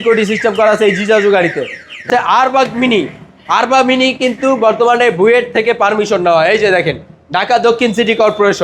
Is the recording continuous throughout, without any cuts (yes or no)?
no